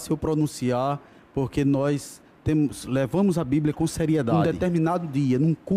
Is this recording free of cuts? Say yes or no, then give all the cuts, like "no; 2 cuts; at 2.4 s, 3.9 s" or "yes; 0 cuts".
no; 1 cut; at 4.3 s